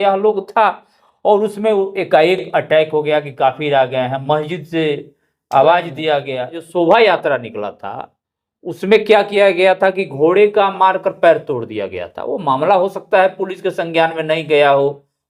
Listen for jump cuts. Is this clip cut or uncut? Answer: cut